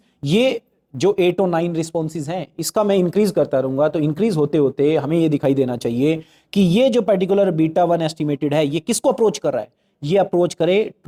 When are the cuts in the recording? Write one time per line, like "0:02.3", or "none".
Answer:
none